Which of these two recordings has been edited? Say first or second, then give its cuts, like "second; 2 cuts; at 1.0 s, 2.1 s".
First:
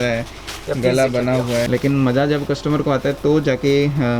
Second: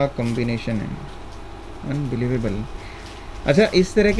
first; 1 cut; at 1.7 s